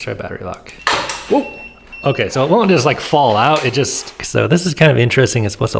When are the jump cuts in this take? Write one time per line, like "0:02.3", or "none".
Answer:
0:04.1